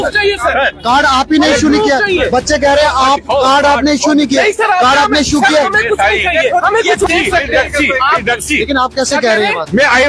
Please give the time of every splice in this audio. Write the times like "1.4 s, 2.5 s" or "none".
7.1 s